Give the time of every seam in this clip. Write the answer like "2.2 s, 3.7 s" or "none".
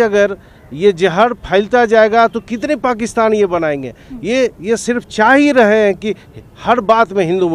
none